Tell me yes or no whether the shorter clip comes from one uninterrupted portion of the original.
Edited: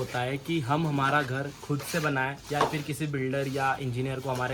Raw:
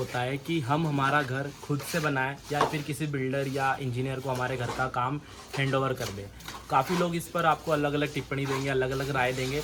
yes